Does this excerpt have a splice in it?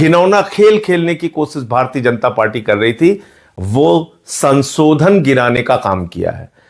no; 0 cuts

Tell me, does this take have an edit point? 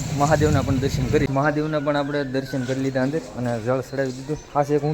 yes; 1 cut; at 1.2 s

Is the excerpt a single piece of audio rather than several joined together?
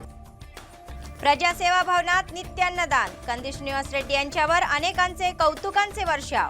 no; 1 cut; at 1.0 s

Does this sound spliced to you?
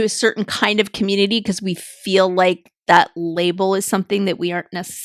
no; 0 cuts

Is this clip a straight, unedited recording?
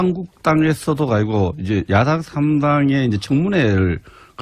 yes; 0 cuts

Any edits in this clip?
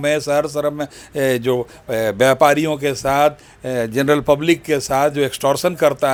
no; 0 cuts

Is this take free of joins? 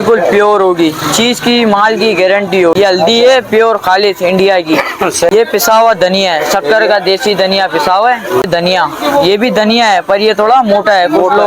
no; 3 cuts; at 2.7 s, 5.3 s, 8.4 s

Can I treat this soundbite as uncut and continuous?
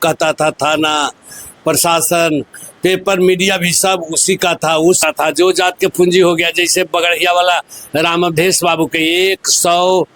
no; 1 cut; at 5.0 s

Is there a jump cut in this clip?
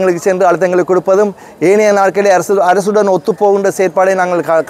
no; 0 cuts

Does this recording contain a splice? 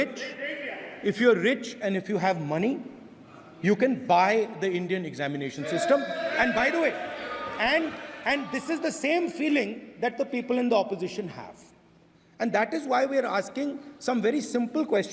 no; 0 cuts

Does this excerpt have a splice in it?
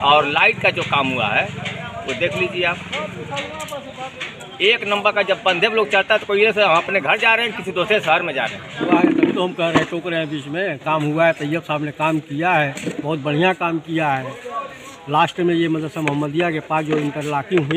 yes; 1 cut; at 8.8 s

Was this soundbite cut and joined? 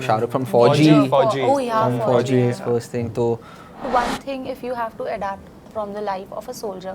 yes; 1 cut; at 3.9 s

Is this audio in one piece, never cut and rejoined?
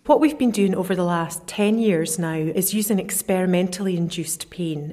no; 2 cuts; at 1.4 s, 2.5 s

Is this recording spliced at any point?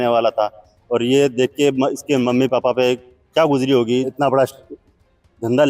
yes; 1 cut; at 4.1 s

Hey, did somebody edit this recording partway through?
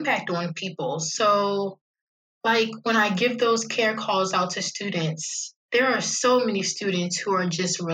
no; 0 cuts

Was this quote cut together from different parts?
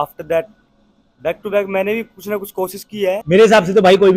yes; 1 cut; at 3.2 s

